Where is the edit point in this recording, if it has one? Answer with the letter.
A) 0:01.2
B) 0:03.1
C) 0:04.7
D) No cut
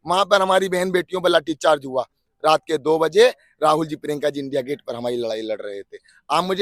D